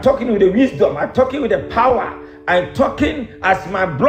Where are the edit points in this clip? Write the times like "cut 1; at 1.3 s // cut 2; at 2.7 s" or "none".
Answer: none